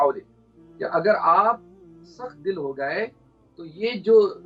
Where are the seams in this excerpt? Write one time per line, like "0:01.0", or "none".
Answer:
none

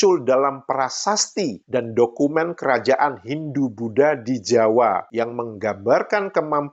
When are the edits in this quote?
0:05.1

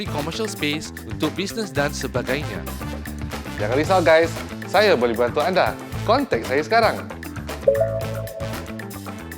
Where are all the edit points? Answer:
0:08.4

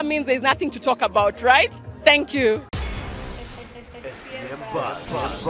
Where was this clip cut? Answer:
0:02.7

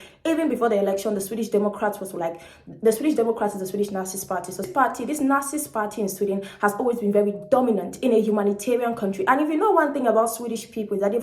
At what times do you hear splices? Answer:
0:04.6

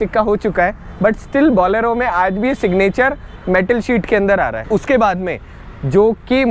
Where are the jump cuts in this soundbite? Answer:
0:04.6

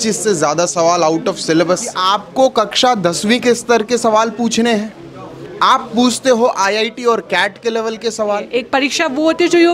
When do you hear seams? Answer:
0:01.9
0:08.5

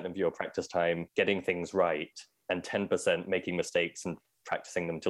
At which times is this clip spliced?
0:01.0

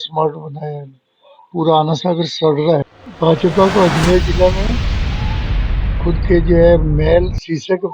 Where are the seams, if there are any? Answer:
0:02.8

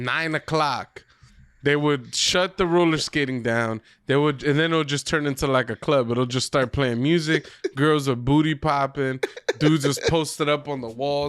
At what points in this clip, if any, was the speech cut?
none

